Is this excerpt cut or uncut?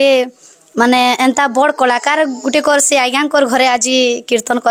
uncut